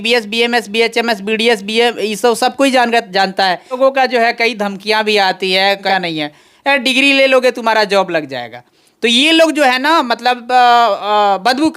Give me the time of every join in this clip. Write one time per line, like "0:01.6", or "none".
0:03.8
0:05.9